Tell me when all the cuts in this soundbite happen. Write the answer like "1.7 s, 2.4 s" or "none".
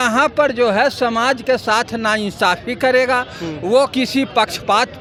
none